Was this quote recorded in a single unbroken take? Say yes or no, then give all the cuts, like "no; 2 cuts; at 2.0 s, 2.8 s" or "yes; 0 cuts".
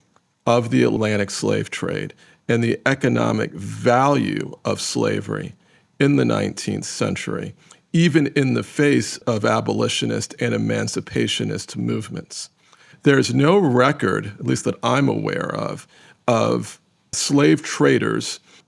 no; 4 cuts; at 1.0 s, 9.2 s, 12.9 s, 17.2 s